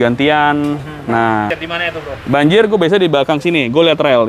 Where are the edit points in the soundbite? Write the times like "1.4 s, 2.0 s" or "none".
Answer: 1.6 s